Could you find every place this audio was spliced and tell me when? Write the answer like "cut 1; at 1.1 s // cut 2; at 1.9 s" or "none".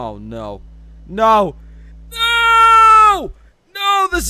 none